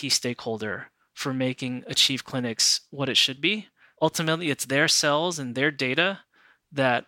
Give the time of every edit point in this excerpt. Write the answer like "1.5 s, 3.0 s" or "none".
3.9 s